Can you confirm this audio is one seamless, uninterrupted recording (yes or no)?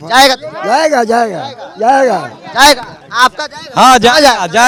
yes